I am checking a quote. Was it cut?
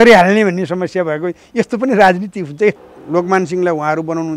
yes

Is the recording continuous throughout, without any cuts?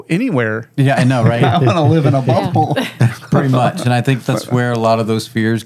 yes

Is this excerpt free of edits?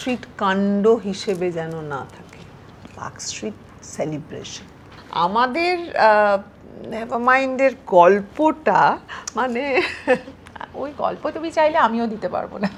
yes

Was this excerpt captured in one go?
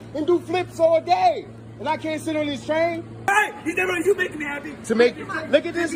no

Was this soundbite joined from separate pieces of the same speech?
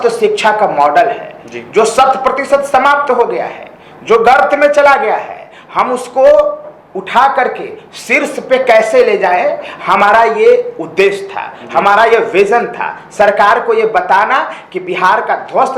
no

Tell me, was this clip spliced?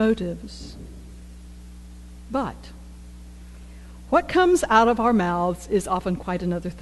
yes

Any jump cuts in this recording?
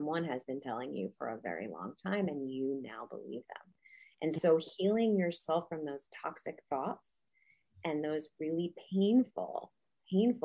no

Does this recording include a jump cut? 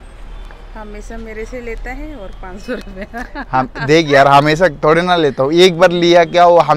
no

